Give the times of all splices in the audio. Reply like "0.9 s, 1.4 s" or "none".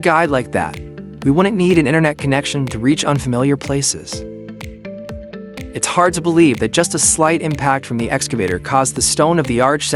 3.8 s, 5.7 s